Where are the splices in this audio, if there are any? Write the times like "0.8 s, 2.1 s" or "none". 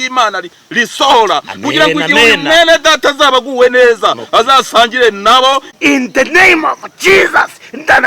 5.7 s